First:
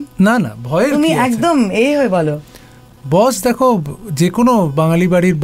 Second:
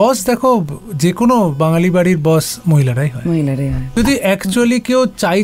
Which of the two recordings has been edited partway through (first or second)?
second